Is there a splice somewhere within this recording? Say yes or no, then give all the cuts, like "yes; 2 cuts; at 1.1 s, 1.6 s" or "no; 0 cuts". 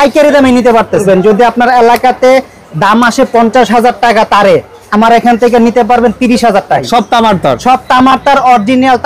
yes; 2 cuts; at 1.0 s, 6.8 s